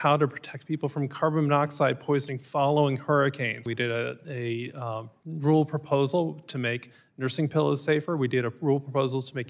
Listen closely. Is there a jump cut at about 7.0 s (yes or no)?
no